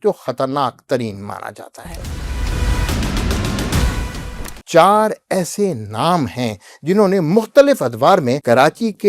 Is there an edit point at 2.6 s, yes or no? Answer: no